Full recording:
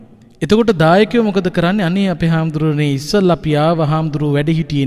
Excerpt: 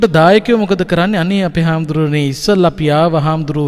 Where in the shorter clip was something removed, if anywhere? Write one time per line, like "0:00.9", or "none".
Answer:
none